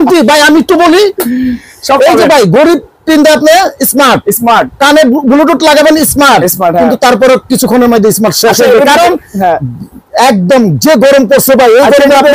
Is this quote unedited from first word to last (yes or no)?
yes